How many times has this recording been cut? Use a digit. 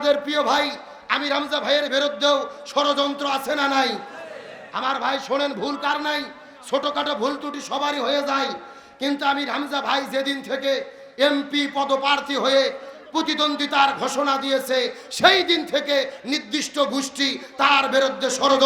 0